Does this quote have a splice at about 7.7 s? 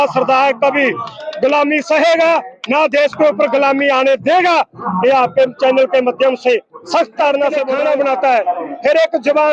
yes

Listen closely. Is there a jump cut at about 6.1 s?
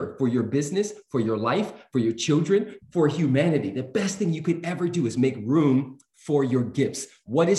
no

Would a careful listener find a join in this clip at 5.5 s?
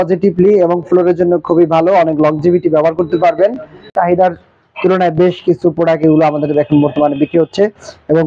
no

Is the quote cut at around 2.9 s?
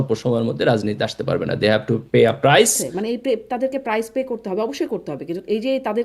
yes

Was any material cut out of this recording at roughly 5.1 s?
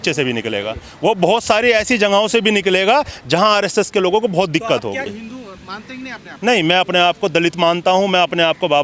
yes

